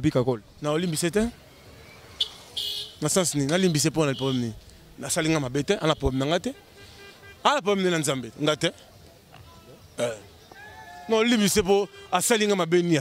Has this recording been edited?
no; 0 cuts

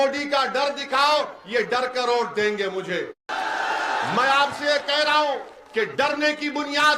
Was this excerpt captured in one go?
no; 1 cut; at 3.2 s

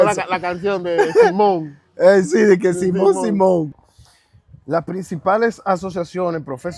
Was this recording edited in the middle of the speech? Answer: yes; 1 cut; at 3.8 s

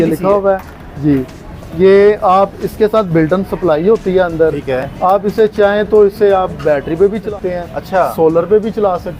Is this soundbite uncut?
no; 1 cut; at 7.2 s

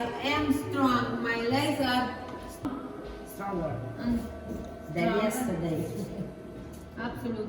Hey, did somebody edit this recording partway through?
yes; 1 cut; at 2.7 s

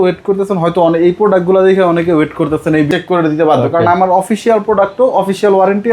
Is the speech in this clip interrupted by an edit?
yes; 1 cut; at 2.9 s

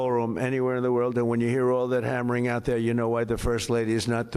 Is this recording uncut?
yes; 0 cuts

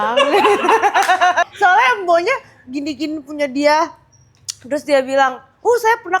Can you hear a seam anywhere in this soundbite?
yes; 1 cut; at 1.5 s

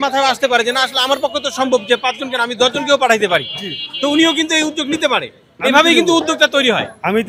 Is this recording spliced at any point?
no; 0 cuts

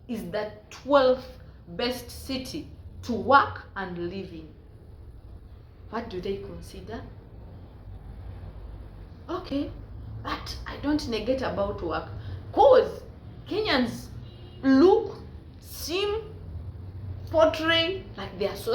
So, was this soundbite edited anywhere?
no; 0 cuts

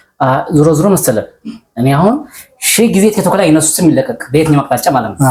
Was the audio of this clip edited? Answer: no; 0 cuts

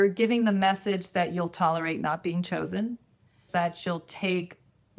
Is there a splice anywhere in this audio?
yes; 1 cut; at 3.5 s

